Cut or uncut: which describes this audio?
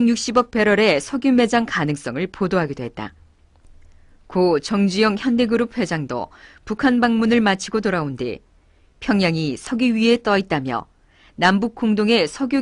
cut